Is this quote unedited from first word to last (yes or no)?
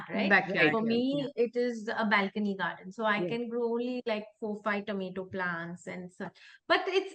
yes